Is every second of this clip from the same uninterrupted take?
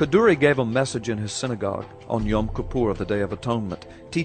no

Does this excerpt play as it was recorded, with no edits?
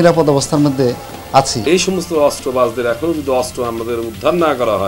no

